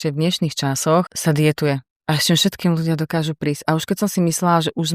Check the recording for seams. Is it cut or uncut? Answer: cut